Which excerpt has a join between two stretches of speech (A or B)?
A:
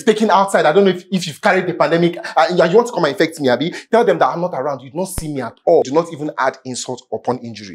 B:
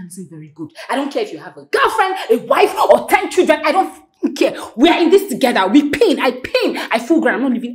A